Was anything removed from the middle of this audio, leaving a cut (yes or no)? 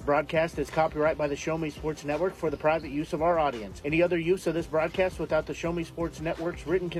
no